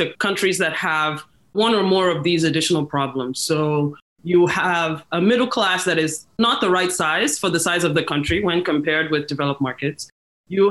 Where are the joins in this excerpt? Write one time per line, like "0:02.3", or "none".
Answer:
none

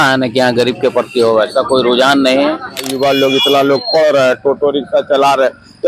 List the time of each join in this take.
0:02.9

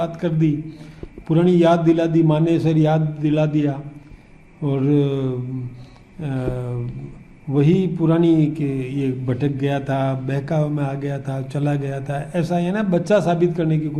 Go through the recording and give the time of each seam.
none

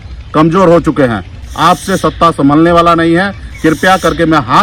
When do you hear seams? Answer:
none

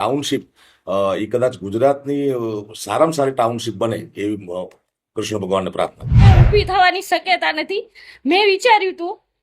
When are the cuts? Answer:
0:06.1

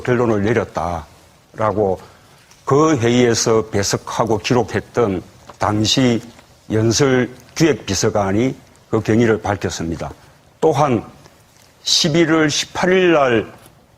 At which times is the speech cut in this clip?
0:10.4

